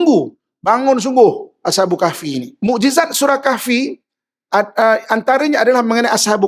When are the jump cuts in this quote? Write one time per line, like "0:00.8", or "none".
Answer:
0:02.5

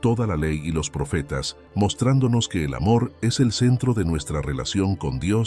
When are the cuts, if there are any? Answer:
0:01.6

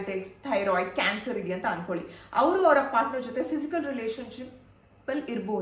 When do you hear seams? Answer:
none

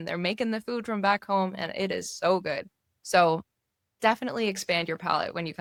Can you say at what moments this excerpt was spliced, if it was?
none

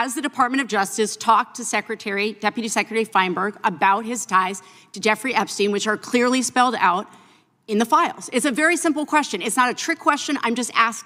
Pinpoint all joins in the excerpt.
none

